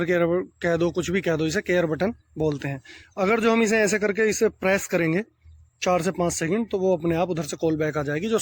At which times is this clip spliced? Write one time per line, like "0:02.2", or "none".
none